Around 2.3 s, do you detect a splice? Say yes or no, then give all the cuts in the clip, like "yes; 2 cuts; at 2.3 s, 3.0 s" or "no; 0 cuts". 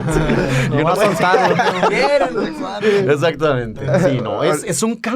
yes; 1 cut; at 2.3 s